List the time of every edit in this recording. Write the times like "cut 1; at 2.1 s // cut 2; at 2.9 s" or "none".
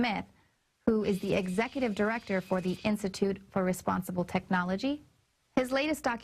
cut 1; at 1.7 s

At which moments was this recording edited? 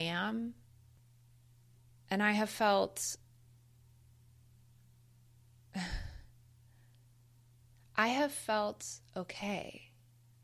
cut 1; at 1.0 s

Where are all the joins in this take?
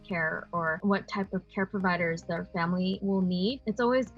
cut 1; at 0.8 s // cut 2; at 3.3 s

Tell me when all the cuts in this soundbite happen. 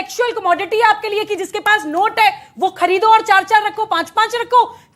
none

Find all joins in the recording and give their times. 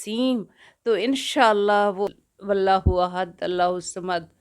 cut 1; at 2.1 s

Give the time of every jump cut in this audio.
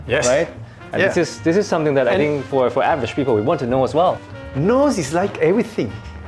cut 1; at 4.3 s

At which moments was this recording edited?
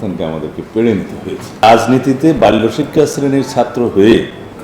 cut 1; at 1.6 s

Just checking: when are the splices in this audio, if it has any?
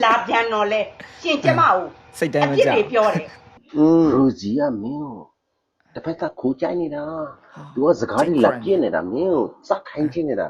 cut 1; at 3.6 s

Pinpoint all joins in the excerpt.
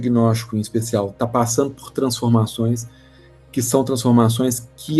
none

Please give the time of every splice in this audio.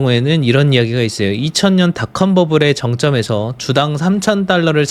none

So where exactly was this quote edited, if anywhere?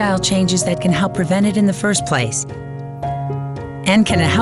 none

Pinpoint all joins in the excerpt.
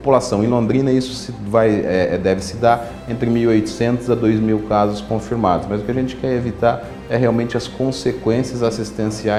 none

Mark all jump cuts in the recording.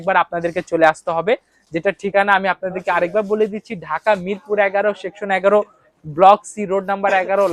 none

